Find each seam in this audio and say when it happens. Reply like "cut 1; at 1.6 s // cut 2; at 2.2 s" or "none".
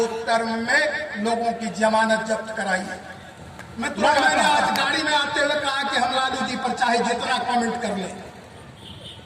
cut 1; at 4.5 s